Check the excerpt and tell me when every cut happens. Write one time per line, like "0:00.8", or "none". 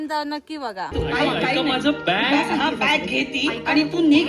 0:00.9